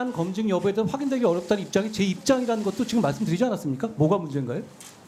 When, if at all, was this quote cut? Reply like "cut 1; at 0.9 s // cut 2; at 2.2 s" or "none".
none

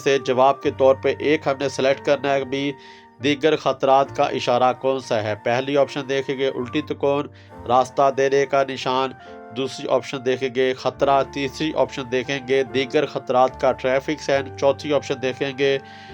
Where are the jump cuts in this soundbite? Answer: none

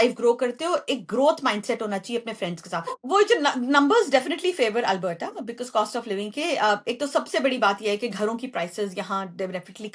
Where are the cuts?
cut 1; at 3.0 s

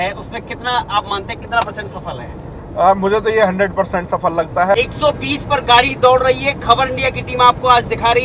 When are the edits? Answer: cut 1; at 4.7 s

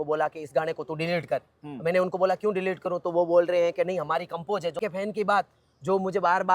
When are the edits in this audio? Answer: cut 1; at 4.8 s

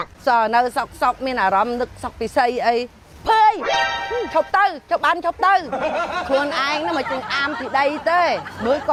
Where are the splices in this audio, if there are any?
none

